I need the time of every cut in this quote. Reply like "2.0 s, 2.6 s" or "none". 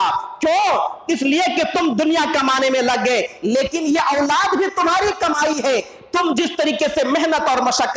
none